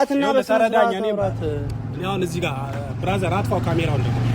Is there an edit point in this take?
yes; 1 cut; at 1.7 s

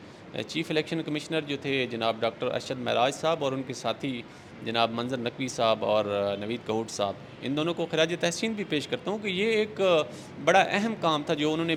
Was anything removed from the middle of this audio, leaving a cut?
no; 0 cuts

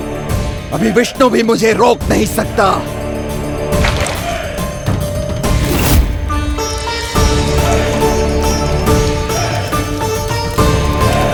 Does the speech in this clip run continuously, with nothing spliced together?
yes; 0 cuts

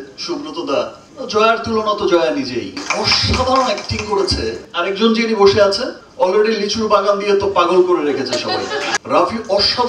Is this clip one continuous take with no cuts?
no; 3 cuts; at 1.1 s, 4.6 s, 9.0 s

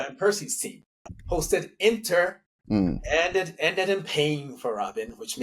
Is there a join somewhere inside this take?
no; 0 cuts

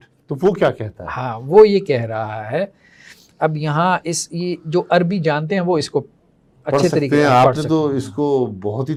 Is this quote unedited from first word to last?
yes; 0 cuts

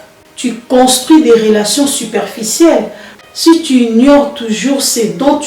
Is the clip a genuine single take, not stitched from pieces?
no; 1 cut; at 3.1 s

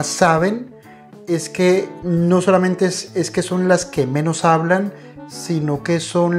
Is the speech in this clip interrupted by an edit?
no; 0 cuts

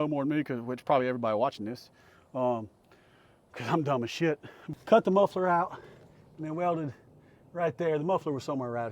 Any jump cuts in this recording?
yes; 1 cut; at 4.5 s

